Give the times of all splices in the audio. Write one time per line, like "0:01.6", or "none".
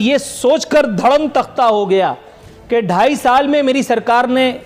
none